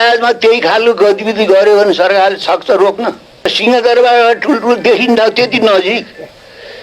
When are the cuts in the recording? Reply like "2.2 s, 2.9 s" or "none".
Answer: 3.6 s